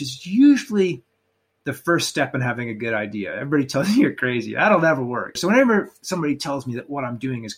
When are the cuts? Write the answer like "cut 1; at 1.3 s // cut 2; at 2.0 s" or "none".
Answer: cut 1; at 5.4 s